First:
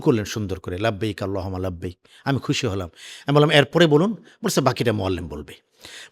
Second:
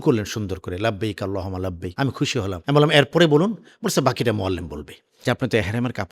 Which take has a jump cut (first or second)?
second